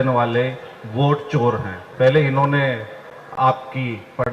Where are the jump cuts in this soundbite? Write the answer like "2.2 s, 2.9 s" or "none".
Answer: 1.8 s